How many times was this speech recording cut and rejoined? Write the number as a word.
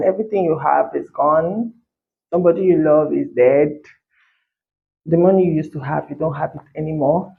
zero